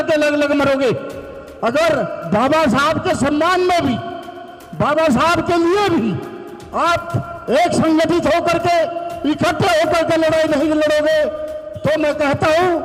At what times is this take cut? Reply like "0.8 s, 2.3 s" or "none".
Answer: none